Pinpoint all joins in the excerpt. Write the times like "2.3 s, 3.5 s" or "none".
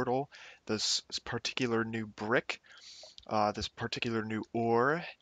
4.0 s